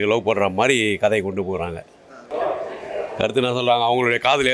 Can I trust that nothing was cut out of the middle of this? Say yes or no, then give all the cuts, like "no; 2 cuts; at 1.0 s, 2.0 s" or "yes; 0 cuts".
no; 1 cut; at 2.3 s